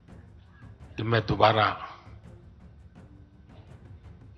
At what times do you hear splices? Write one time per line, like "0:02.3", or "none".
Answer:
0:01.0
0:02.0